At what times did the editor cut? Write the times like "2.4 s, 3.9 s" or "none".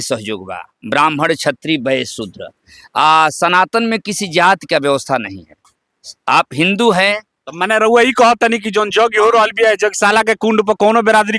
none